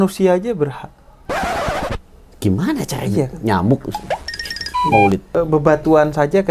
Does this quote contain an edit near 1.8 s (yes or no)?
no